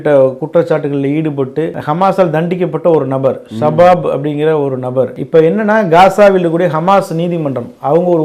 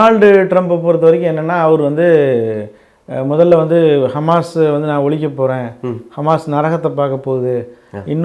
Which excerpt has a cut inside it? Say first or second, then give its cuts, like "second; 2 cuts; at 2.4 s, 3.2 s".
first; 1 cut; at 5.1 s